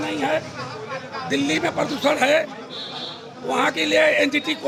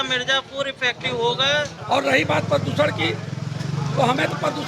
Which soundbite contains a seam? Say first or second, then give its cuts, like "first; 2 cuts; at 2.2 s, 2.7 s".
second; 1 cut; at 1.8 s